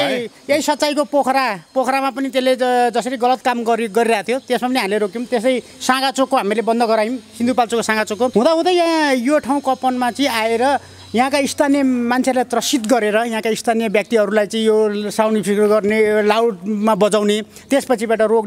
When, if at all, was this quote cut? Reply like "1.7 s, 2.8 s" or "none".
8.3 s